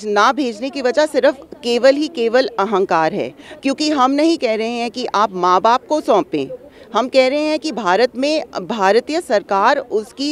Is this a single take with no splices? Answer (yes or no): yes